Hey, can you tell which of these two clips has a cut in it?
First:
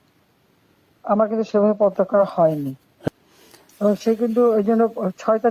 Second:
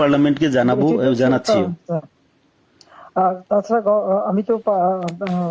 first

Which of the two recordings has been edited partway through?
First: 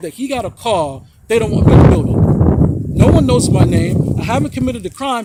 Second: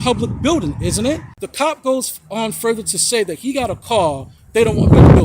second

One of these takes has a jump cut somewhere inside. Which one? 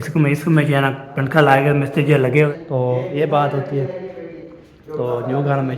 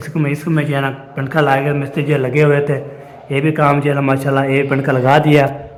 first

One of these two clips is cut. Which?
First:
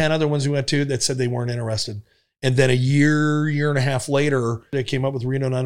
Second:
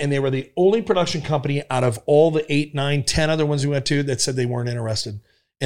first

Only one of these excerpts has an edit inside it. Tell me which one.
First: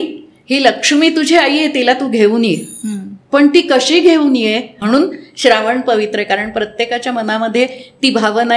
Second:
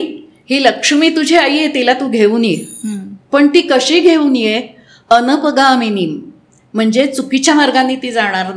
first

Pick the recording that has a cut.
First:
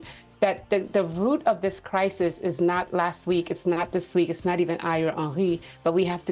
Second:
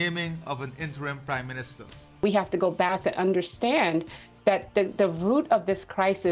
second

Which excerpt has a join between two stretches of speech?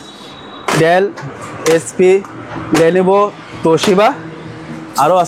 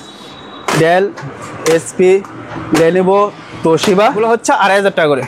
second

